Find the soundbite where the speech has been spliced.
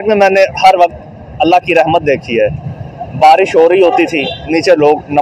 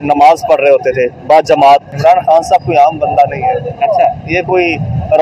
second; 1 cut; at 1.9 s

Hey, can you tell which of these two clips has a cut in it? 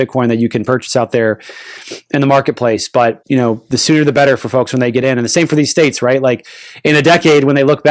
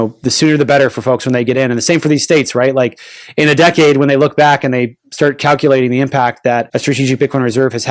second; 1 cut; at 6.7 s

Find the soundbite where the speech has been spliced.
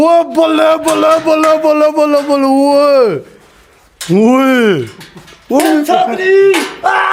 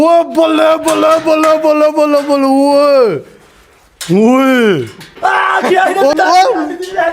second; 2 cuts; at 5.1 s, 6.1 s

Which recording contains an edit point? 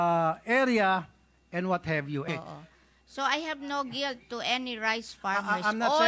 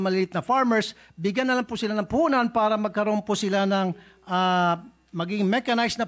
first; 1 cut; at 2.2 s

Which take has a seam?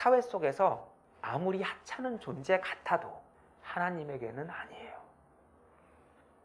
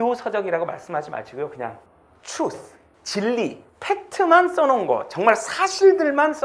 second; 1 cut; at 3.7 s

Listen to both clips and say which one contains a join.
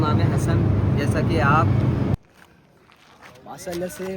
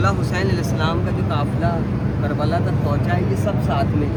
first; 1 cut; at 2.2 s

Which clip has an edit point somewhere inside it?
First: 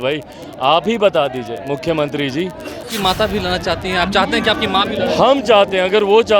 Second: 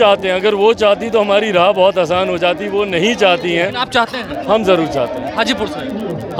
first; 1 cut; at 2.8 s

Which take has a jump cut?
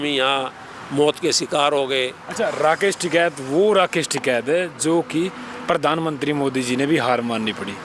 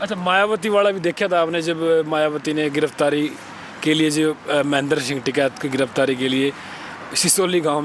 first; 1 cut; at 2.2 s

